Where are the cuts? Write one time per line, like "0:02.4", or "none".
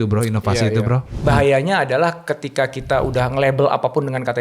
0:01.2